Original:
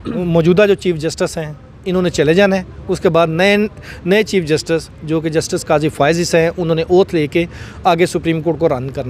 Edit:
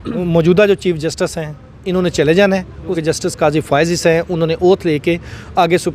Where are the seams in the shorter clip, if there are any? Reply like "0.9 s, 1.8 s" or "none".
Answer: 3.0 s